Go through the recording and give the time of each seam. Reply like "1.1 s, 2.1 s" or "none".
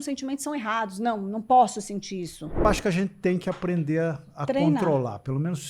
2.6 s